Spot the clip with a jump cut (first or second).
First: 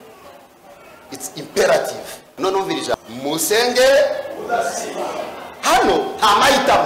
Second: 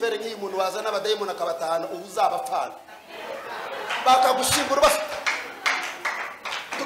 first